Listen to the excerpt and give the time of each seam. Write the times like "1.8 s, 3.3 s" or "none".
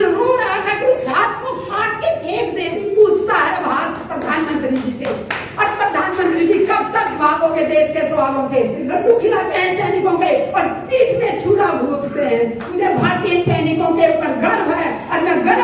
3.1 s, 8.9 s, 12.8 s